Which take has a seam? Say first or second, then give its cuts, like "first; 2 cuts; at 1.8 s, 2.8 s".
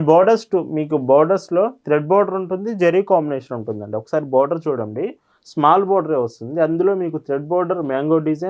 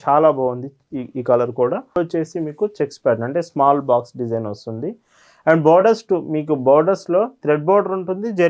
second; 1 cut; at 1.9 s